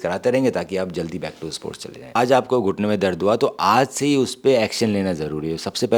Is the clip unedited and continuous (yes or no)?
no